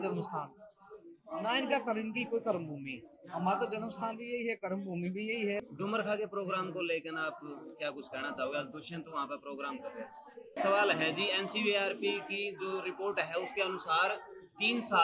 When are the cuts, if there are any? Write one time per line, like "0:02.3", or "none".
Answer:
0:05.6
0:10.5